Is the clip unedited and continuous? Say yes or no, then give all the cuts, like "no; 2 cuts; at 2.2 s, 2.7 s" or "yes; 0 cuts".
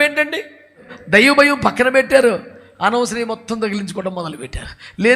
no; 1 cut; at 0.9 s